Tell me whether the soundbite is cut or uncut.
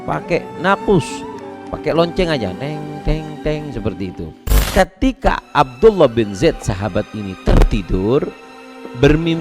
cut